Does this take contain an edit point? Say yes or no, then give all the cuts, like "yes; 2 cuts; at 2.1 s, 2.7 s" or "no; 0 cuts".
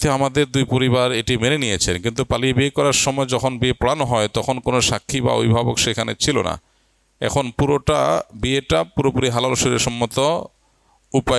no; 0 cuts